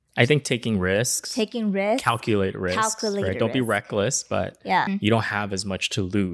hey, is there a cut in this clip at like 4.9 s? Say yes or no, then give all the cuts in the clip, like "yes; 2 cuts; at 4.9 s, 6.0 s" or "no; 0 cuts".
yes; 1 cut; at 4.9 s